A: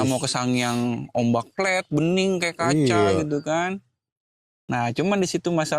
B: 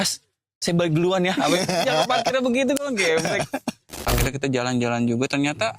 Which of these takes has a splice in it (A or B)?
B